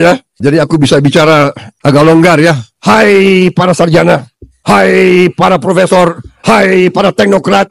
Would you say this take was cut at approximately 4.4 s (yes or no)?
no